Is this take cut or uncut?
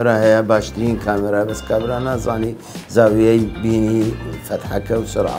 uncut